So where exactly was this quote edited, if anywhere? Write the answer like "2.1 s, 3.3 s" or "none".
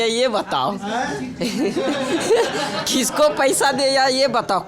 none